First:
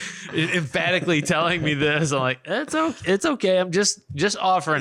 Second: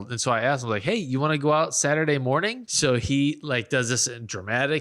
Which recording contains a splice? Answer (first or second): second